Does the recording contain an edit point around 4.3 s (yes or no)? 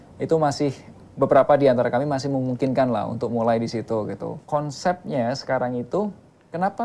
yes